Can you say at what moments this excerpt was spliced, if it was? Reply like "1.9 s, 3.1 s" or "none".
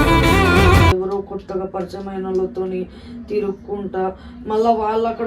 0.9 s